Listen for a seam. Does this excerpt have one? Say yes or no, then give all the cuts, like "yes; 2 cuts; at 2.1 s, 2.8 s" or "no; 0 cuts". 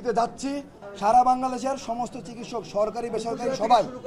no; 0 cuts